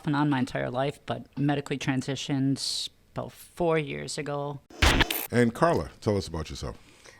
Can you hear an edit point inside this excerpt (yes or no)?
yes